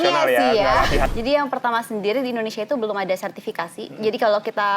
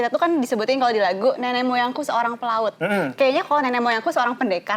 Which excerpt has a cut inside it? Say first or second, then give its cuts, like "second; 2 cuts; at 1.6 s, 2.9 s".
first; 1 cut; at 1.1 s